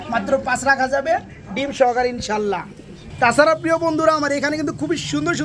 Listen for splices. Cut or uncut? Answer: uncut